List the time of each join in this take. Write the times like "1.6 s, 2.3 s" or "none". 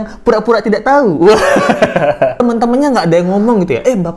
2.4 s